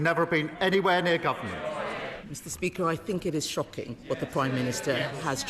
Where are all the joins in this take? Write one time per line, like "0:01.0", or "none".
0:02.1